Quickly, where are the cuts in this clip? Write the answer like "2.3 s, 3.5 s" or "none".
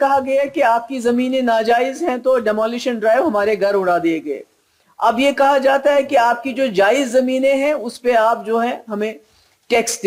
none